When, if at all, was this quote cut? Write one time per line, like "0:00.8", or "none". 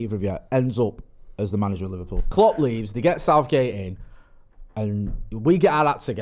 0:02.2